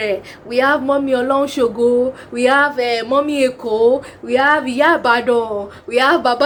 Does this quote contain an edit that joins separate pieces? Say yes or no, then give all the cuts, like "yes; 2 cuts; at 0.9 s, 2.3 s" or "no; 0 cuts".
no; 0 cuts